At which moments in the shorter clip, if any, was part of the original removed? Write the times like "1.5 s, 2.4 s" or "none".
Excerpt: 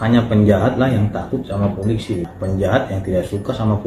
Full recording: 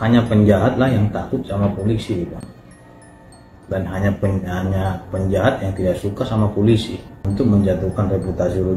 2.3 s